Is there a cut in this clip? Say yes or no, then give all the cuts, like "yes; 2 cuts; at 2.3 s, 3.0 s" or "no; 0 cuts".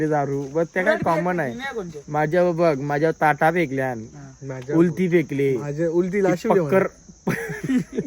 no; 0 cuts